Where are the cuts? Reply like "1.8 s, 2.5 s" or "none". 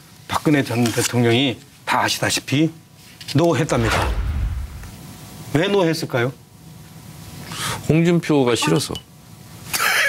8.5 s